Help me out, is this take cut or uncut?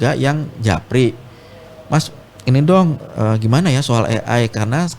uncut